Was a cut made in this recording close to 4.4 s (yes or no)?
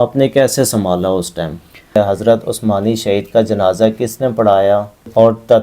no